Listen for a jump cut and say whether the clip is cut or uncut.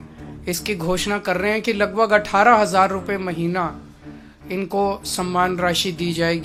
uncut